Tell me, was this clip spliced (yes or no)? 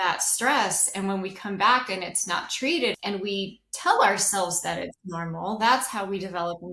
yes